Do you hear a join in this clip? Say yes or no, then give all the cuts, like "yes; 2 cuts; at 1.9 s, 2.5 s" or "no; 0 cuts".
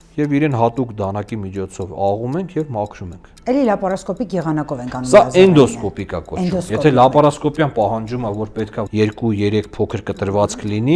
yes; 2 cuts; at 3.3 s, 8.8 s